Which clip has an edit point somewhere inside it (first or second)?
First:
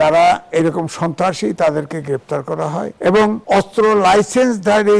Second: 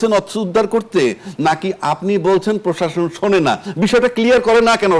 first